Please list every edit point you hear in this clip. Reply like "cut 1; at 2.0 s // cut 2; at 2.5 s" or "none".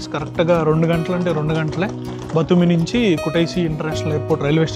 none